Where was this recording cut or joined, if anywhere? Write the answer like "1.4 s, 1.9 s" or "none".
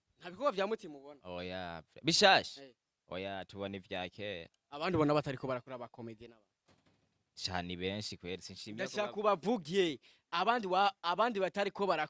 4.6 s